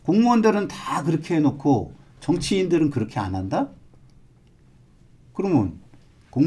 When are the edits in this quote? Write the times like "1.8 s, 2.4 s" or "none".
none